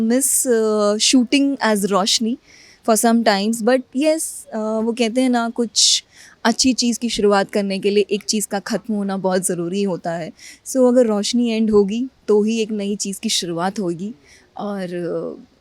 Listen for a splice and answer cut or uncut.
uncut